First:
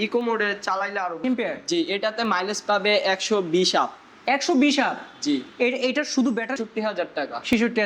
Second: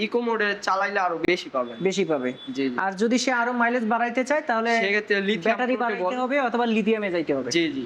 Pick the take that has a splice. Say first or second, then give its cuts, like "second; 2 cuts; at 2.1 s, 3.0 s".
first; 2 cuts; at 1.2 s, 6.6 s